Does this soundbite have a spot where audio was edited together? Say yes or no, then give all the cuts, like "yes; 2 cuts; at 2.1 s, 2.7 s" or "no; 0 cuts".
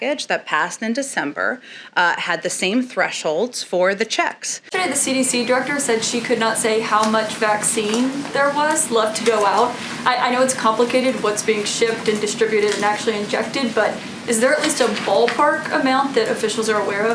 yes; 1 cut; at 4.7 s